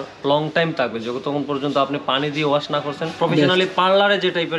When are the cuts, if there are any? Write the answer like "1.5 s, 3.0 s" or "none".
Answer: 3.1 s